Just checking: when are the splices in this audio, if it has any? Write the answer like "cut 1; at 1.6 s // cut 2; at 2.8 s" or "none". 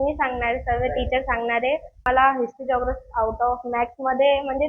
cut 1; at 2.0 s